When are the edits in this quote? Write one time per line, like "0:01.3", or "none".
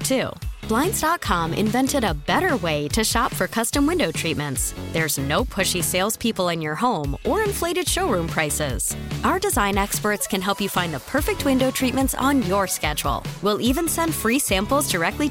none